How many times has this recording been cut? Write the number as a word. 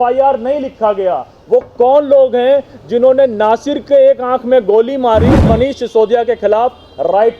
one